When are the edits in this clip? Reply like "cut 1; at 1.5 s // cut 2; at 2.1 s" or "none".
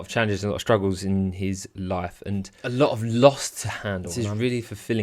cut 1; at 2.5 s // cut 2; at 4.1 s